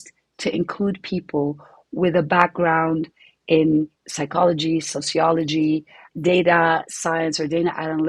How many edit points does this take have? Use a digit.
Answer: 1